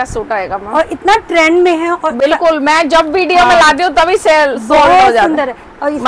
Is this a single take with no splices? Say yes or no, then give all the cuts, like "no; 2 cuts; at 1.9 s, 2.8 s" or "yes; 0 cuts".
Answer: yes; 0 cuts